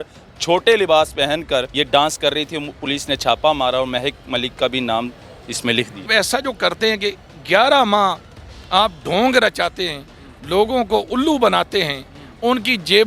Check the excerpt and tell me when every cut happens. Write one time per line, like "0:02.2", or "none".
0:01.7
0:06.1